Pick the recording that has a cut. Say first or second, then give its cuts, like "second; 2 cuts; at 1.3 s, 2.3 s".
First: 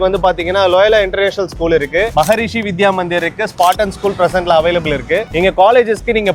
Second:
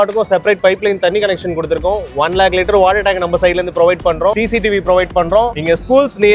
second; 2 cuts; at 4.3 s, 5.6 s